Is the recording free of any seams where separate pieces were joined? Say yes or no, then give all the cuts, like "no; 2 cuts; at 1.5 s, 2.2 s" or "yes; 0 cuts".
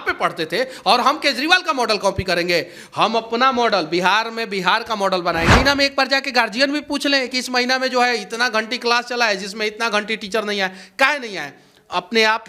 no; 1 cut; at 5.5 s